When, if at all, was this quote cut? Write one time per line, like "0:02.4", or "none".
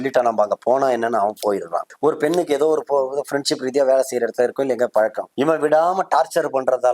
0:01.8
0:05.2